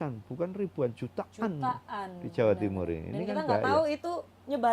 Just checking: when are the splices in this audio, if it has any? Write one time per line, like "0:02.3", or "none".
none